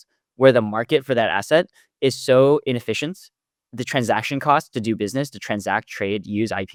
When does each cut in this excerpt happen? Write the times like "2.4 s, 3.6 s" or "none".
none